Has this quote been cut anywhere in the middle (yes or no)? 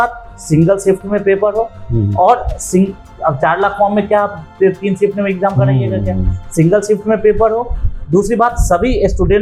no